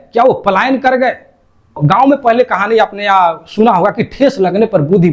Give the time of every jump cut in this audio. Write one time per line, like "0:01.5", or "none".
0:01.8